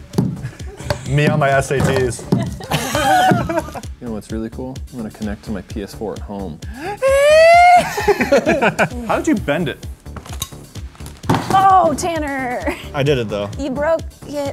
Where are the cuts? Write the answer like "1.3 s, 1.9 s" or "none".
3.8 s, 8.9 s